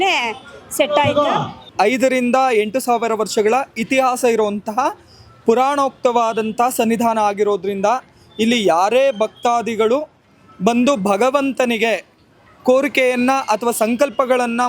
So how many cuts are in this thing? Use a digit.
1